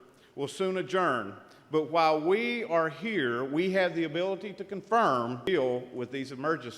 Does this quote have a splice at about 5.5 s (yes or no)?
yes